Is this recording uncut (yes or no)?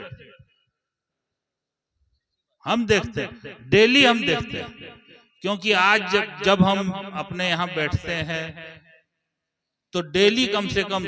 yes